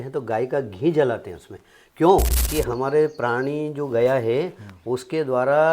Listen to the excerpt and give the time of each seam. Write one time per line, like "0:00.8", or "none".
0:02.4